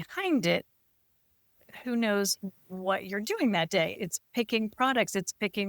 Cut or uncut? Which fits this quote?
cut